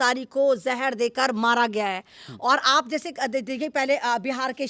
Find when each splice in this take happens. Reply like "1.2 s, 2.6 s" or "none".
none